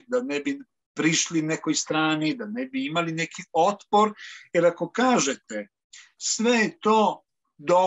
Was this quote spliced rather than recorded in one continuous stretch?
no; 0 cuts

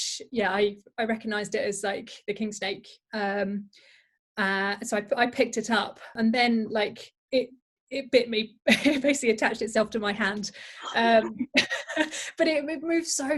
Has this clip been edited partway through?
yes; 1 cut; at 6.1 s

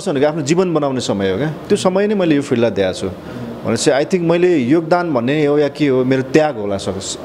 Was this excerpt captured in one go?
yes; 0 cuts

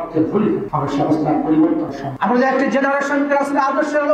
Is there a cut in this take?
yes; 1 cut; at 2.0 s

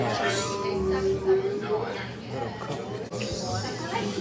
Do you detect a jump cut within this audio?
yes; 1 cut; at 3.0 s

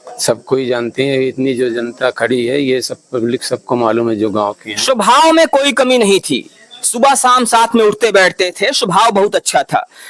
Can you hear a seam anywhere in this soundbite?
no; 0 cuts

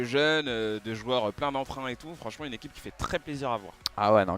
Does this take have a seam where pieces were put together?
yes; 1 cut; at 2.1 s

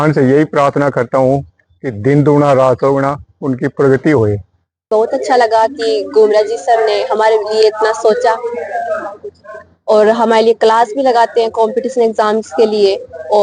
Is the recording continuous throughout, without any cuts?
no; 1 cut; at 4.9 s

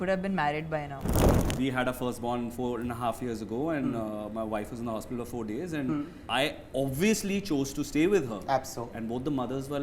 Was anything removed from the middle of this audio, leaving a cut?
yes; 2 cuts; at 1.5 s, 6.2 s

